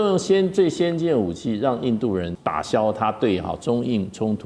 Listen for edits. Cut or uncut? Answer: cut